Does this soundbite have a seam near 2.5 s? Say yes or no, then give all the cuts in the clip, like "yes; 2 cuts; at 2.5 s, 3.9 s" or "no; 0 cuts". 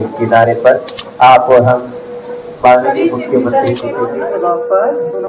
no; 1 cut; at 4.1 s